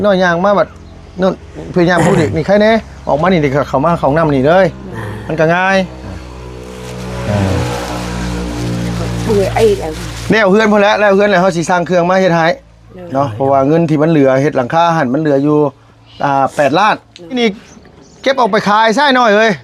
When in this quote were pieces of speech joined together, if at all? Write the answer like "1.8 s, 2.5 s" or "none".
17.4 s